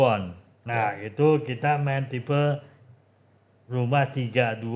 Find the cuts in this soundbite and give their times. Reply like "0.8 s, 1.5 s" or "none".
none